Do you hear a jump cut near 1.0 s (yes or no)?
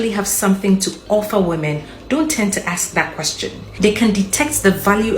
no